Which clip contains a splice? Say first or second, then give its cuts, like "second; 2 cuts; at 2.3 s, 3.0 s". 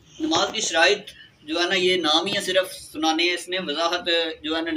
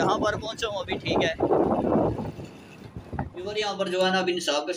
second; 1 cut; at 3.4 s